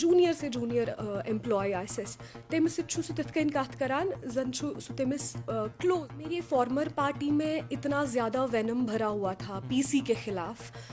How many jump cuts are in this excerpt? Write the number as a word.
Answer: one